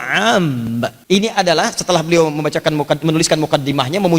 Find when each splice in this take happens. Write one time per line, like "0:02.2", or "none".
0:01.0